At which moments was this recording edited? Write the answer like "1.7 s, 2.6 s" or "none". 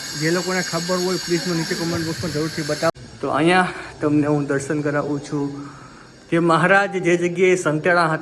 2.9 s